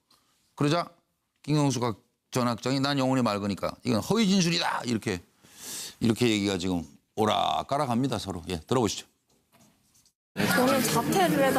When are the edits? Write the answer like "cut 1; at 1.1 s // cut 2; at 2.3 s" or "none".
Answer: none